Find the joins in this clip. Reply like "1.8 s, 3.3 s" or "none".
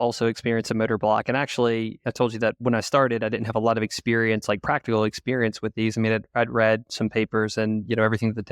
2.0 s